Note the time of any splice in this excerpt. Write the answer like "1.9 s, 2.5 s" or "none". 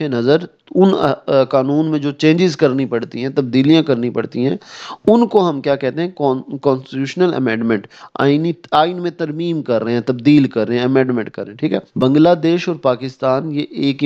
11.9 s